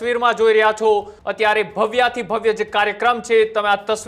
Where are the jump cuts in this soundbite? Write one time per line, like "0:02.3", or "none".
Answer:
0:01.2